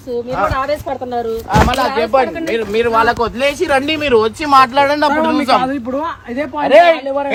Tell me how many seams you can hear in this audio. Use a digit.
0